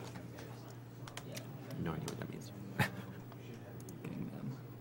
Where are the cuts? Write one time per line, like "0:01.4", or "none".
0:01.8